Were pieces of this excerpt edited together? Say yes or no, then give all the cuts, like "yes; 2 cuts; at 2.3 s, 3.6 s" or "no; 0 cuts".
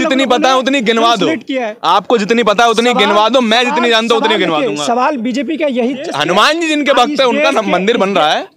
yes; 1 cut; at 6.1 s